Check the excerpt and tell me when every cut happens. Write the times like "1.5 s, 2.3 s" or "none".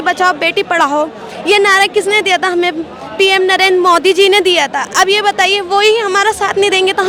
none